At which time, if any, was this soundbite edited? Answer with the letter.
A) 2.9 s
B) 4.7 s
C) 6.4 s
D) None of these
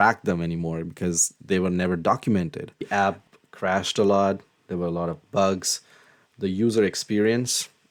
A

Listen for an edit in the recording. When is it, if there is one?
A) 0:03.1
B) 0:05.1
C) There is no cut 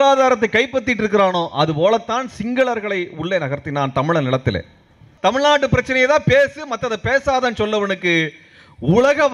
B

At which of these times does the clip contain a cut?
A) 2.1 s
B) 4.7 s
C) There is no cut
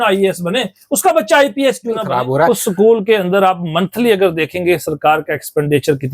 A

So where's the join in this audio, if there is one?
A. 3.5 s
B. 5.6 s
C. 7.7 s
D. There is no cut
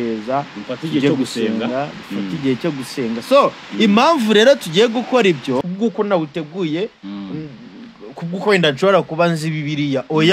B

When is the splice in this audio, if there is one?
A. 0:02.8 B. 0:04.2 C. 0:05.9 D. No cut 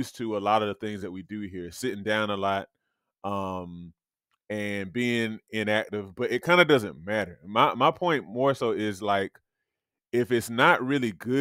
D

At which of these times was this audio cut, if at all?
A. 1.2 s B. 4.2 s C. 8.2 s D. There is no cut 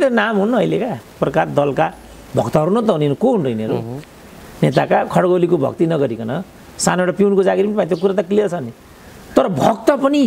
A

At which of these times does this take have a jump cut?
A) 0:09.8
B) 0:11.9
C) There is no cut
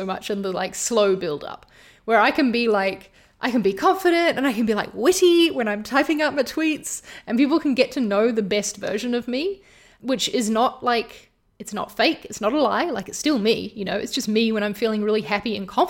A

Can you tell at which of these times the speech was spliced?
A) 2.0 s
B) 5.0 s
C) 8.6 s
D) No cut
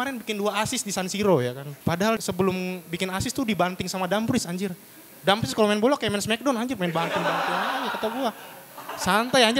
A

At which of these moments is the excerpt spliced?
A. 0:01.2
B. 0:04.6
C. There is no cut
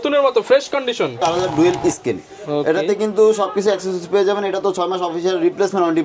A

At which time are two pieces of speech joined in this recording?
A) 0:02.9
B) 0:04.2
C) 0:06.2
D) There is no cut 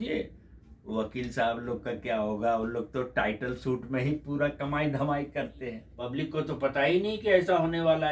C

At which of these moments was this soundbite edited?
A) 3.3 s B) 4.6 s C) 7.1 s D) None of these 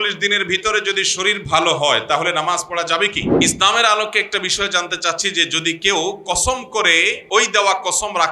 A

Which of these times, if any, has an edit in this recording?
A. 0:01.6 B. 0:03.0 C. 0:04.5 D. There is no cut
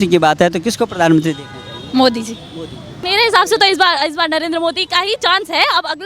B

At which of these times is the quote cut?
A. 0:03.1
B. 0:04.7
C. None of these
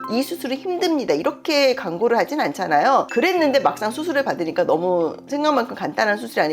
A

